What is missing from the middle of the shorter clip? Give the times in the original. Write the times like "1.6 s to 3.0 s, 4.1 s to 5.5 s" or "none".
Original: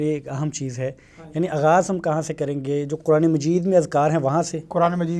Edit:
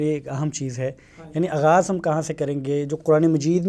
none